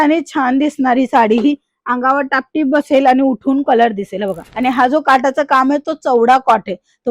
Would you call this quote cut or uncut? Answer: cut